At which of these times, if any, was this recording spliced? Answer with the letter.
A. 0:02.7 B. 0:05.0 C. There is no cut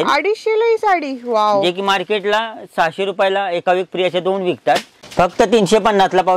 B